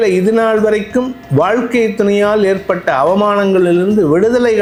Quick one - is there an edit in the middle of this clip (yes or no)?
no